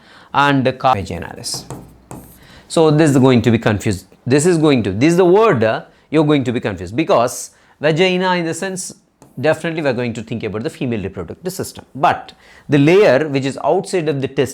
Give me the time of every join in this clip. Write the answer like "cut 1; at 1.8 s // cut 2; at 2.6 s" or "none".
cut 1; at 0.9 s